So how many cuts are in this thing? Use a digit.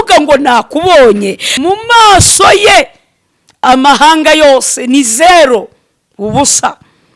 1